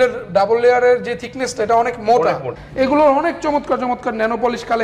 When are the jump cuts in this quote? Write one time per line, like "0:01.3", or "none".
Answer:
0:02.5